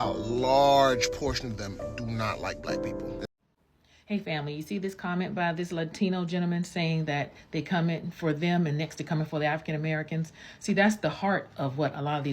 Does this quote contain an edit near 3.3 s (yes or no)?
yes